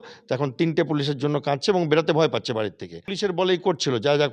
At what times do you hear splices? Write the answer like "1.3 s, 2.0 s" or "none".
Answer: 3.1 s